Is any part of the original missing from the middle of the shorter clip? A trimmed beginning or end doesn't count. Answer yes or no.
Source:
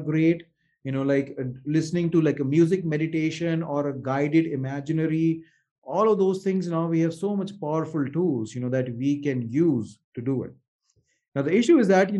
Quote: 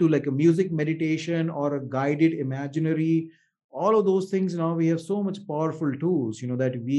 no